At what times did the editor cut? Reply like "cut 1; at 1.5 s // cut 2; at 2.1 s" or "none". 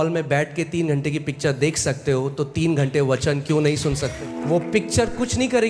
cut 1; at 4.3 s